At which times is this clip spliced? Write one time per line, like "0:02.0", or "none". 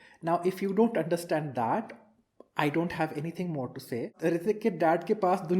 0:04.1